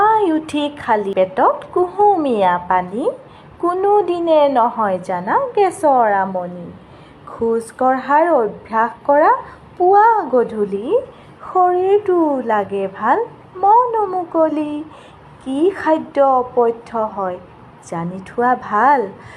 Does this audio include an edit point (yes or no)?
yes